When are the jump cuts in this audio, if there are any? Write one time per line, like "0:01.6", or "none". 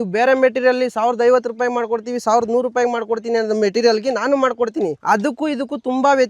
0:05.0